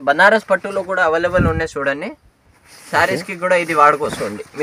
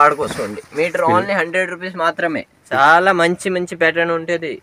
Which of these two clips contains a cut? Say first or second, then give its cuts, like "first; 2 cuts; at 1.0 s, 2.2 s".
second; 1 cut; at 2.6 s